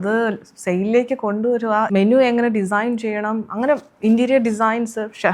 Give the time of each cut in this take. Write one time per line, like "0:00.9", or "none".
0:01.9